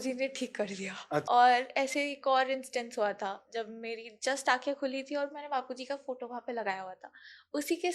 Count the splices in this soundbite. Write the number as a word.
one